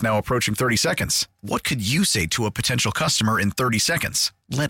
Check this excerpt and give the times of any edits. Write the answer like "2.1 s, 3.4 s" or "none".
none